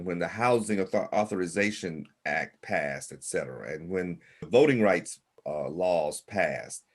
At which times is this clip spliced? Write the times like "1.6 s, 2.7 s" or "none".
4.5 s, 5.4 s

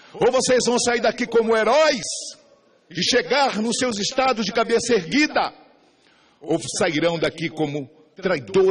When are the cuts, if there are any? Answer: 3.4 s

